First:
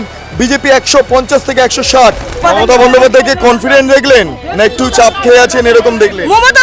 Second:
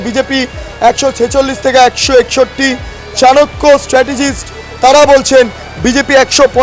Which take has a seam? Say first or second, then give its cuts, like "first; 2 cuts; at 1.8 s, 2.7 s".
first; 1 cut; at 2.4 s